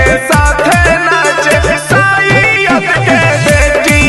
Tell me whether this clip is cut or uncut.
uncut